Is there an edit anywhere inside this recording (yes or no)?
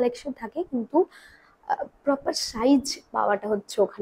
no